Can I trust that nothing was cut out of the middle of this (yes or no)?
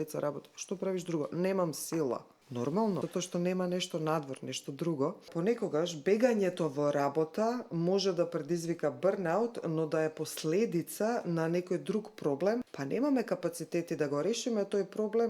no